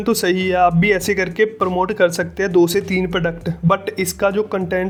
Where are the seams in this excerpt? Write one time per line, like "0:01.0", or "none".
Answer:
none